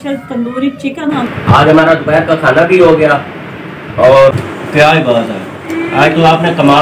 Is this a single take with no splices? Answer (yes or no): no